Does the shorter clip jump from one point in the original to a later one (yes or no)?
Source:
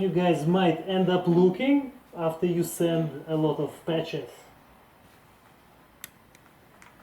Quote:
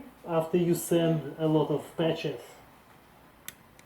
yes